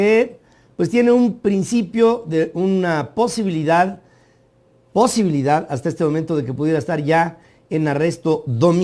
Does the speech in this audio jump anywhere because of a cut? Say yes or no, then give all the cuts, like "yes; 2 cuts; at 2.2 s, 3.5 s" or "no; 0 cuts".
yes; 1 cut; at 1.5 s